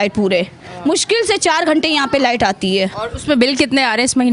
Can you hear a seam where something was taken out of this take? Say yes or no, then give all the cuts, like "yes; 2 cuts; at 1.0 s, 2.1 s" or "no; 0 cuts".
no; 0 cuts